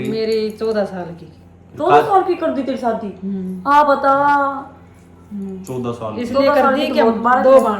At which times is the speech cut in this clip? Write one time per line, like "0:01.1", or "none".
none